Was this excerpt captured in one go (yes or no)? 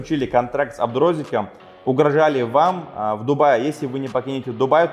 yes